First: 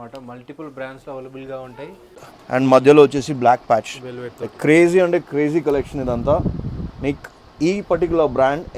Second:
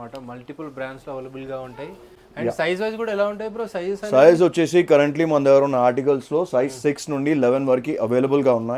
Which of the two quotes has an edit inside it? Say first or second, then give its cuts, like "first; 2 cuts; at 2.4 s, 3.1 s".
first; 1 cut; at 2.3 s